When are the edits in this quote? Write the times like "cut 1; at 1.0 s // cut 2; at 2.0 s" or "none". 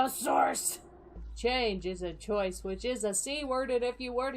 cut 1; at 1.2 s